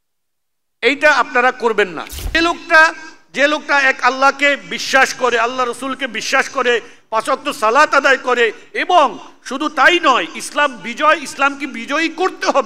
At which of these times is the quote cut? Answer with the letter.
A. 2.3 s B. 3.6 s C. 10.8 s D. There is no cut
A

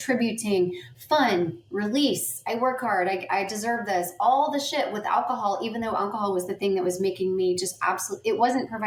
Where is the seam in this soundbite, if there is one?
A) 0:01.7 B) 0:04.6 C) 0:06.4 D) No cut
D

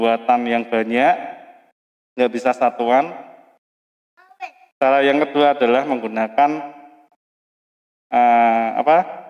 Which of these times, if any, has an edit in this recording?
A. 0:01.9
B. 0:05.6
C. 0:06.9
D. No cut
D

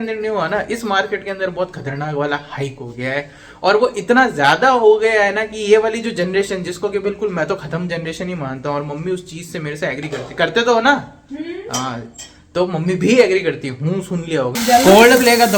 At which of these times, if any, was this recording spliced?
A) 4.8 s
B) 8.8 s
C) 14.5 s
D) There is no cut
C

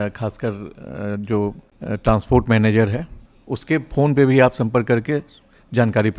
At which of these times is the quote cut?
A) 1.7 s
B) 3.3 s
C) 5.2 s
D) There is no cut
A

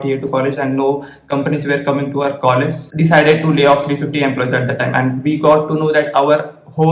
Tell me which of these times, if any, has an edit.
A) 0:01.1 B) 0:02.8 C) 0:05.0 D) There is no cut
B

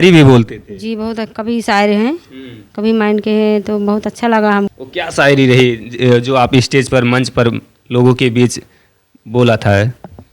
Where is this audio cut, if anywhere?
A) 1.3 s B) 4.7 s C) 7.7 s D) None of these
B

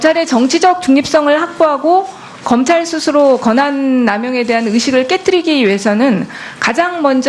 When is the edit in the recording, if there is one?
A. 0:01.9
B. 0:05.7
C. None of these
B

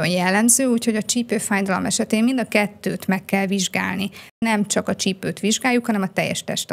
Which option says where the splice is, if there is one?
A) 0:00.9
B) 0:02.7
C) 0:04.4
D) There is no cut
C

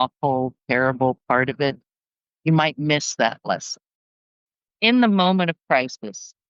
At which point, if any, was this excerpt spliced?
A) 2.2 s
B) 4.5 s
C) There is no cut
B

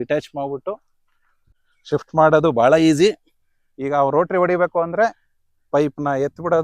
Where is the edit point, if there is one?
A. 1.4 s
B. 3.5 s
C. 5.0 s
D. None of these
A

